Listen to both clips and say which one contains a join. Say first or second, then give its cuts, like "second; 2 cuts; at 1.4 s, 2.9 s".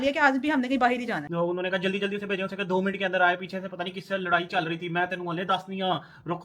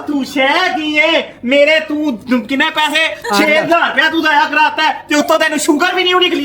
first; 1 cut; at 1.3 s